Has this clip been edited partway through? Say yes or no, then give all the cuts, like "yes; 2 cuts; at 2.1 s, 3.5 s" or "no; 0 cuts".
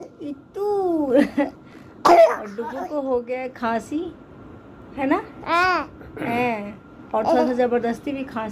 no; 0 cuts